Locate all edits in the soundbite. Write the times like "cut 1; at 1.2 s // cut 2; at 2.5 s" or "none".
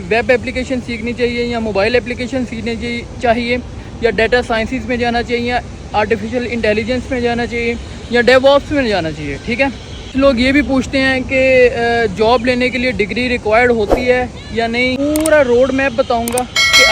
cut 1; at 10.1 s // cut 2; at 15.0 s